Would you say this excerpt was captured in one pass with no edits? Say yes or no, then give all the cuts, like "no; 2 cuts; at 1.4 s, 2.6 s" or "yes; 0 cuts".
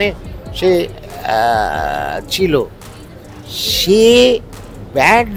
yes; 0 cuts